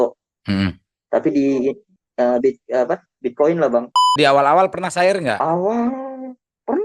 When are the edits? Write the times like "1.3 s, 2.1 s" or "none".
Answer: 4.1 s